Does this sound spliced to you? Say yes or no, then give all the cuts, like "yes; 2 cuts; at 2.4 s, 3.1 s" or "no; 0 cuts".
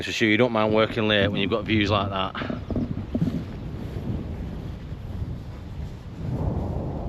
no; 0 cuts